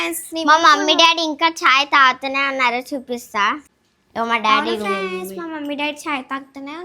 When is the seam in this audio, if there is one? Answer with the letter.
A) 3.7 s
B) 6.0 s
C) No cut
A